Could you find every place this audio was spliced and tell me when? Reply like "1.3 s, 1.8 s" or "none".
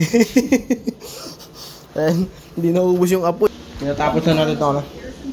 3.5 s